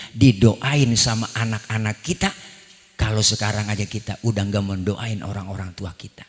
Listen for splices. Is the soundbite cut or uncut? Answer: uncut